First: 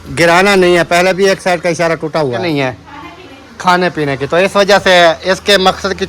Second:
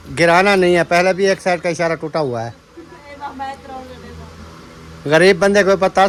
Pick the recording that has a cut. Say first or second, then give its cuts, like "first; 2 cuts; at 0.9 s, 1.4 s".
first; 1 cut; at 2.4 s